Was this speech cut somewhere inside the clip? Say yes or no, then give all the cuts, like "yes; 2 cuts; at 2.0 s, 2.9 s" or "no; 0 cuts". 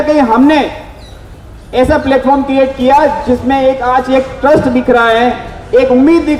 no; 0 cuts